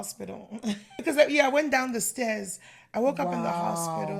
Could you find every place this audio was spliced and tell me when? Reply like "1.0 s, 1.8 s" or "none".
1.0 s